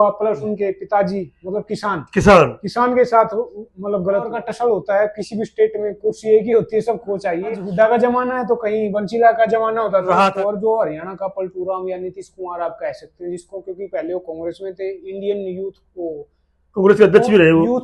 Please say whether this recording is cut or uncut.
cut